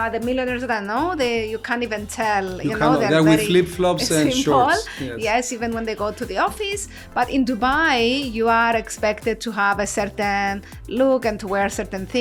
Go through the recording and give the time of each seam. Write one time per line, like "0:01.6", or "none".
none